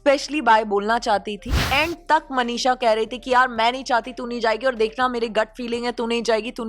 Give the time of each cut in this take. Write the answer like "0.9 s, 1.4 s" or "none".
1.6 s